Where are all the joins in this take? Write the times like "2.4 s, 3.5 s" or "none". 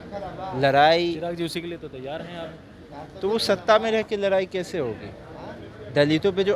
none